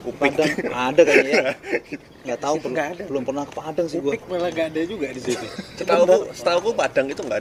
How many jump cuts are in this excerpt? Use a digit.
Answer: 0